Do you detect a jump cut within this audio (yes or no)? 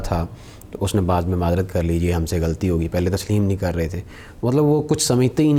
no